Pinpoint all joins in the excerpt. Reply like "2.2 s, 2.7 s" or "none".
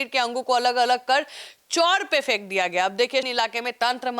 3.3 s